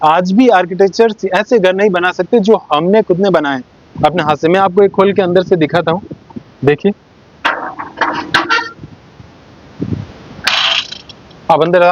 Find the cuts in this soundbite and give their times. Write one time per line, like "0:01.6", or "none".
none